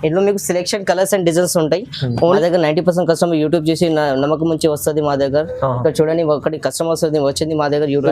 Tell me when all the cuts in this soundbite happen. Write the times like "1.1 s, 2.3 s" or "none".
2.4 s

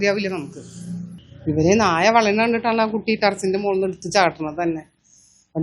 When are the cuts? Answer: 1.2 s

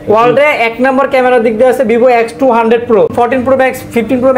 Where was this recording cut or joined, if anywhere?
3.1 s

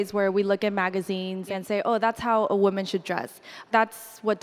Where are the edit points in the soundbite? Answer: 1.5 s, 3.6 s

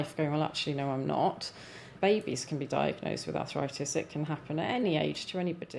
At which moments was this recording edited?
1.9 s, 4.8 s

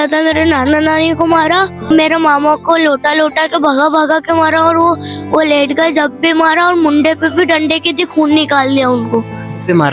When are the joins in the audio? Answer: 1.9 s

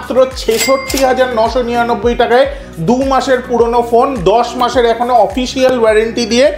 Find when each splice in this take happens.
none

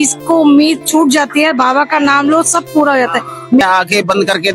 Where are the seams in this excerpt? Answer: 3.6 s

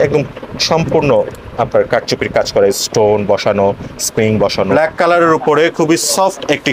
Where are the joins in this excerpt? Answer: 4.7 s

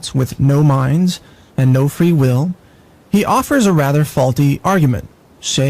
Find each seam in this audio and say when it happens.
1.0 s

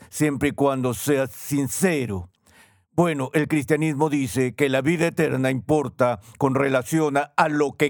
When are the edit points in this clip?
none

